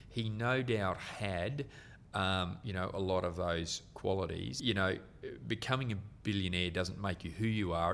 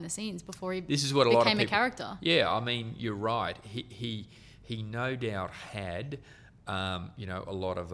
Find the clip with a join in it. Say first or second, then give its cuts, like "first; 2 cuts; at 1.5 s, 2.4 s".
first; 1 cut; at 4.5 s